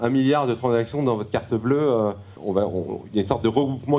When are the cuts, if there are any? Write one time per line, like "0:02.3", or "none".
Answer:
none